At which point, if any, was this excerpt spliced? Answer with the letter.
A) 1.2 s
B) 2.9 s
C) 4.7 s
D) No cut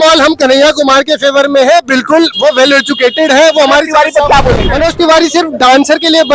C